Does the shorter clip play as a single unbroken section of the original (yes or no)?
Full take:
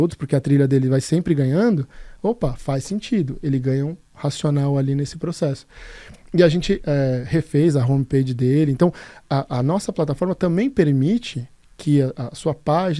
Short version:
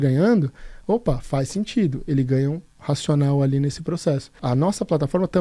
no